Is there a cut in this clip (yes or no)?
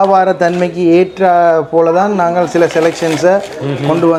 no